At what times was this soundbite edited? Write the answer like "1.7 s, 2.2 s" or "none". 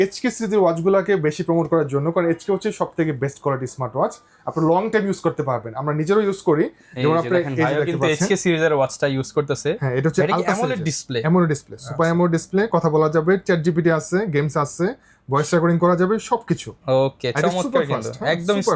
none